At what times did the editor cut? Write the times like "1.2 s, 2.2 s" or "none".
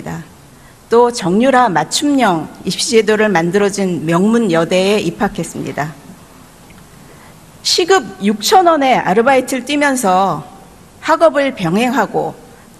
8.4 s